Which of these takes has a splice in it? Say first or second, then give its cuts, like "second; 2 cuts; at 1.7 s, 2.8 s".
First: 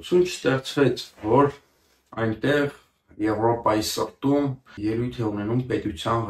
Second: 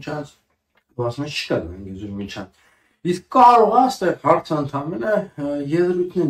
first; 1 cut; at 4.7 s